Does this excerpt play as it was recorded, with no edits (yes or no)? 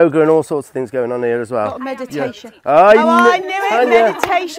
yes